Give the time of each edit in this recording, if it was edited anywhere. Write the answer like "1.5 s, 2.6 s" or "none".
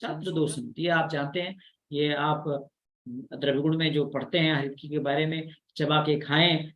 none